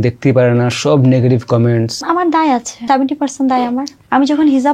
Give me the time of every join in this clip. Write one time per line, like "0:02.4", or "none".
0:02.0
0:02.7
0:03.9